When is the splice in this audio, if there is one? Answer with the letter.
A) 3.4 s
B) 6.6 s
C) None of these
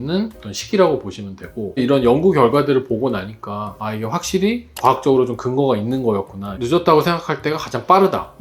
B